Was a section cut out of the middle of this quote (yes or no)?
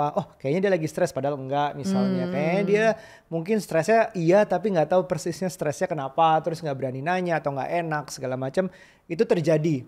no